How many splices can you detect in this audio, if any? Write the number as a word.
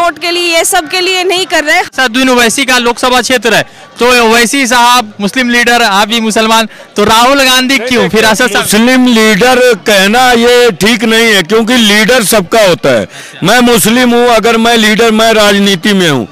one